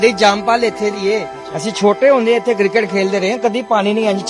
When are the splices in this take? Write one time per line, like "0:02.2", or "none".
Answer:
none